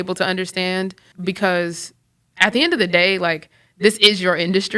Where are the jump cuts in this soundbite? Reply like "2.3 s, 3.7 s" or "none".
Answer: 1.1 s